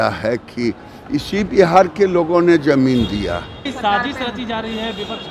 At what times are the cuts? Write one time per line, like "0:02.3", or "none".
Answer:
0:03.7